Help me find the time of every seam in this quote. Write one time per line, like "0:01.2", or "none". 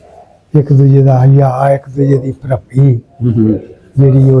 none